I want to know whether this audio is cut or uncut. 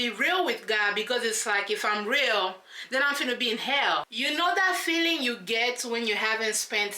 cut